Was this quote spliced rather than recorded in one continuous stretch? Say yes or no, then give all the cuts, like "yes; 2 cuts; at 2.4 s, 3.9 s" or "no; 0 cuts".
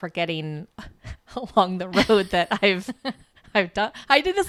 no; 0 cuts